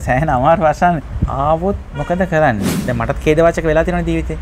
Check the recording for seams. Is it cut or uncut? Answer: cut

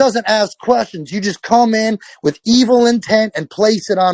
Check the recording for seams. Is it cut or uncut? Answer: uncut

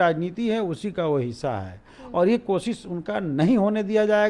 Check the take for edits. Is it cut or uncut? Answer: uncut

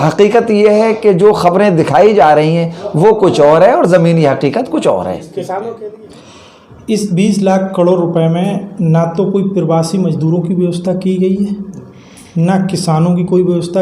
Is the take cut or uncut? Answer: cut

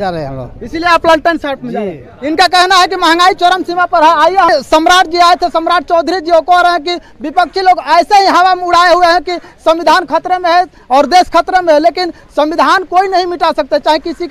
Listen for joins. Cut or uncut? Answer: cut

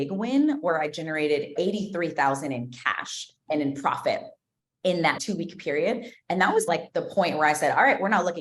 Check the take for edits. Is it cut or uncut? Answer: cut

